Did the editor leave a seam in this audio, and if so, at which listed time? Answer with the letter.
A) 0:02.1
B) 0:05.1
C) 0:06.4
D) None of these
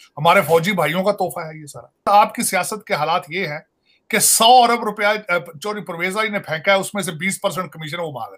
A